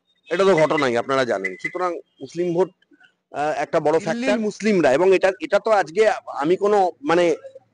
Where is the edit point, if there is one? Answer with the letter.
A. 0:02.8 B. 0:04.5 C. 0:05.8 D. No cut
B